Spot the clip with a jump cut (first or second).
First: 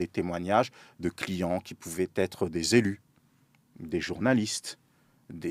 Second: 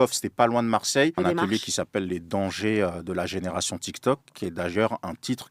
second